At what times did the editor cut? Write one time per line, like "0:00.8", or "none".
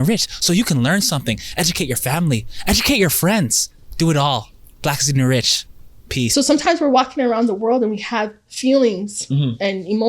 0:06.3